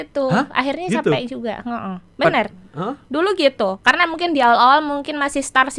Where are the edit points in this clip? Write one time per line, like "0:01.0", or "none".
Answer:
none